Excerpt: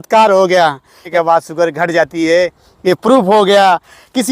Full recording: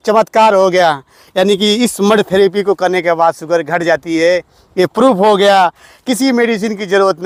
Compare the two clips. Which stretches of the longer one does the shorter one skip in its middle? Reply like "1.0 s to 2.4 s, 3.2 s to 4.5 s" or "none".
1.3 s to 3.0 s